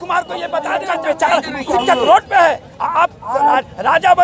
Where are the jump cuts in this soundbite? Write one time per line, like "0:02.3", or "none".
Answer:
0:00.9